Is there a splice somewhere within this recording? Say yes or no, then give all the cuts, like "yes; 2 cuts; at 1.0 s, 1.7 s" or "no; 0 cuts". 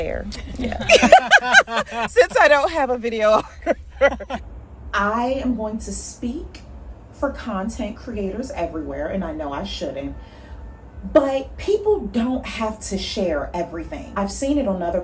yes; 2 cuts; at 4.4 s, 14.1 s